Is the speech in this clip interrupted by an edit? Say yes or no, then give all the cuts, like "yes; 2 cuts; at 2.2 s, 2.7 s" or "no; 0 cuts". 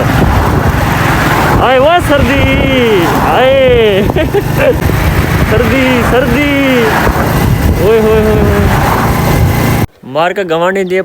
yes; 2 cuts; at 4.8 s, 10.0 s